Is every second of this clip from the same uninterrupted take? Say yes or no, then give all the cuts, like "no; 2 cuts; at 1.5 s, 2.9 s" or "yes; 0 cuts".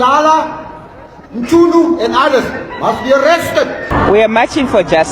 no; 1 cut; at 3.8 s